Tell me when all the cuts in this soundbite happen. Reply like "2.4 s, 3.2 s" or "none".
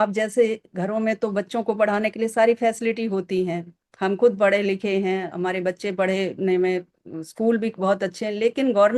none